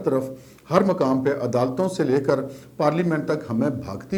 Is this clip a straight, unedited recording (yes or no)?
yes